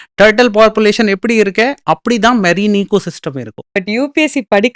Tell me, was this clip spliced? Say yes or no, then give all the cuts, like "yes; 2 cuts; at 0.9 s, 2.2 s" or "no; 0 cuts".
yes; 1 cut; at 3.6 s